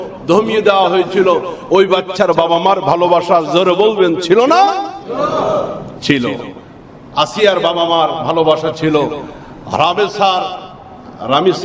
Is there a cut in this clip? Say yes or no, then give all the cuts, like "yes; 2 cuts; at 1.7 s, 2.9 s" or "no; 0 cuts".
no; 0 cuts